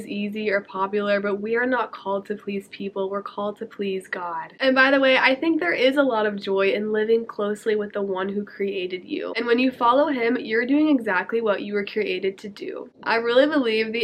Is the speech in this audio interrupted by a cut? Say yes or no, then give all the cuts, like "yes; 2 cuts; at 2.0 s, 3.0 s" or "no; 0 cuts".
no; 0 cuts